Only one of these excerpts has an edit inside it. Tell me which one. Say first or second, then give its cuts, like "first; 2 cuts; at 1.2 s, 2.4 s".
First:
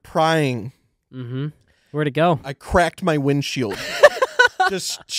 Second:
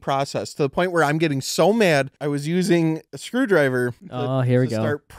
second; 3 cuts; at 2.1 s, 3.1 s, 4.1 s